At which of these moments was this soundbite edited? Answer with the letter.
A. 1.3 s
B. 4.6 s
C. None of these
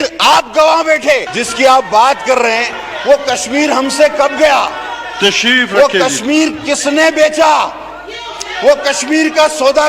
A